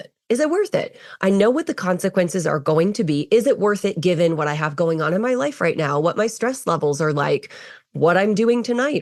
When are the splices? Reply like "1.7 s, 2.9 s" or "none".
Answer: none